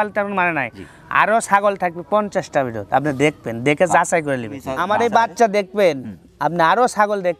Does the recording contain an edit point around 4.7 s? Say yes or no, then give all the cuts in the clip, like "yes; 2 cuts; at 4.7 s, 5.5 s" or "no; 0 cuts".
yes; 1 cut; at 4.7 s